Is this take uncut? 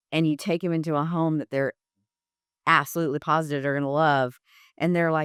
yes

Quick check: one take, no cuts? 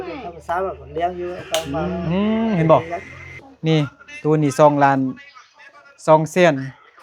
no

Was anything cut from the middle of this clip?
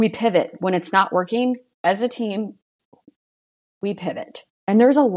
no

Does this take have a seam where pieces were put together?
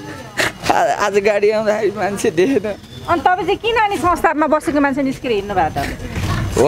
no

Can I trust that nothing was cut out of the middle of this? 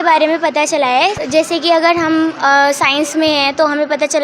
no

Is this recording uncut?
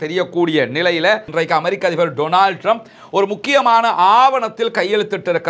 no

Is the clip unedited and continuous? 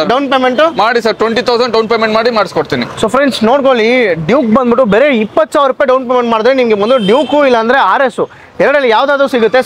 yes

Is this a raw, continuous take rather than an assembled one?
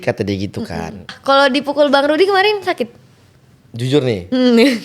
no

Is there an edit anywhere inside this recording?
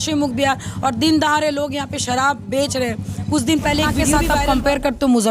yes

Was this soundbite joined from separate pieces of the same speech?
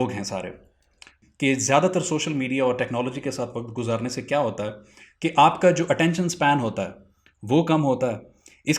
yes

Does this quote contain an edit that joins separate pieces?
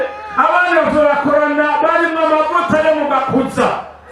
no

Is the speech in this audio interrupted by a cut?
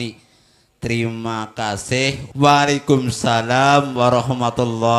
yes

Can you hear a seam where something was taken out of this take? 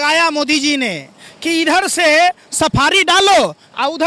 no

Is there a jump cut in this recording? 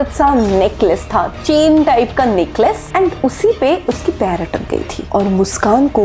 no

